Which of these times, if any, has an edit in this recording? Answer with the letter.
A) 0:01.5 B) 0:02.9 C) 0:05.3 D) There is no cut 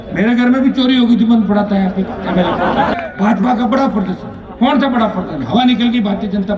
B